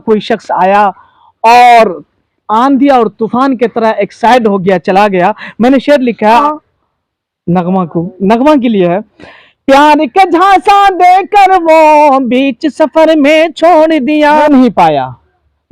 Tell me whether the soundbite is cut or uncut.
cut